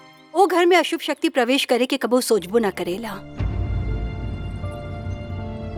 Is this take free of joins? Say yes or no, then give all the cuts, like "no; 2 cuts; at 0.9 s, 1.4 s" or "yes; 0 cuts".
yes; 0 cuts